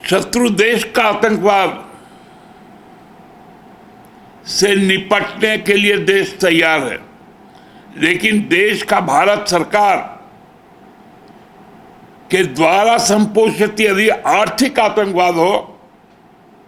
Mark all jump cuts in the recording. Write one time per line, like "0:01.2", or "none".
none